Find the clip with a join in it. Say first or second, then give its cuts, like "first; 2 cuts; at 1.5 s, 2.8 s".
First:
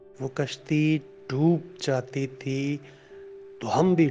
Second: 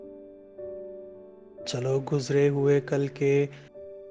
second; 1 cut; at 1.1 s